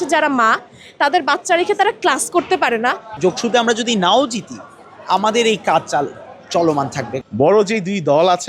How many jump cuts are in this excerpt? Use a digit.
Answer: 2